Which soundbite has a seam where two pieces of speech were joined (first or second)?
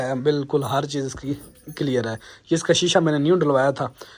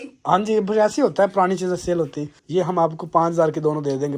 second